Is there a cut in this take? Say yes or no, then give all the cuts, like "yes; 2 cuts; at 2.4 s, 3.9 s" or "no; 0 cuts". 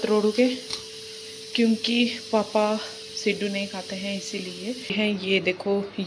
yes; 1 cut; at 4.9 s